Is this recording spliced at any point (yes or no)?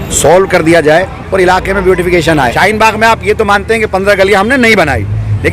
yes